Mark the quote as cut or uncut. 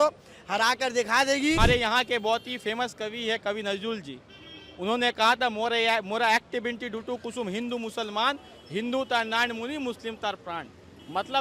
cut